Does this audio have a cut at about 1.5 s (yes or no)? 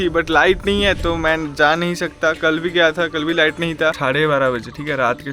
no